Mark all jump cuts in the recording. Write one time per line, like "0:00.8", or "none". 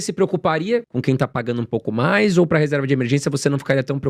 0:00.9